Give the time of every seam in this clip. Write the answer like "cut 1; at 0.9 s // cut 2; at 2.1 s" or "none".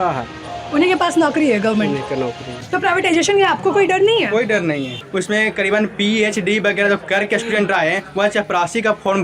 cut 1; at 2.6 s // cut 2; at 5.0 s